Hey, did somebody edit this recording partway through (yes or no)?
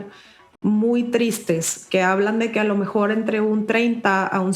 no